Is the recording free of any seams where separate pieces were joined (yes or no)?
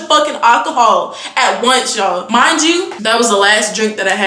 yes